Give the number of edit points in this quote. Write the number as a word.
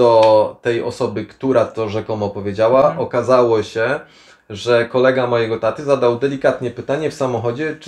zero